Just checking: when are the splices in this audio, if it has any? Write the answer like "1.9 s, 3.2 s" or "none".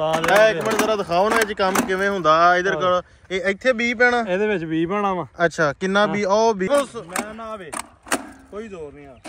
6.7 s